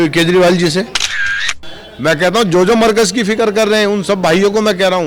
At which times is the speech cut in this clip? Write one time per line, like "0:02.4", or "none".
0:01.3